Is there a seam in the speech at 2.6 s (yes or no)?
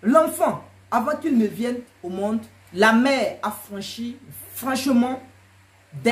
yes